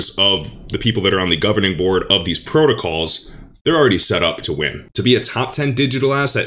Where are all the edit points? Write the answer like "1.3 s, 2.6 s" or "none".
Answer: 4.7 s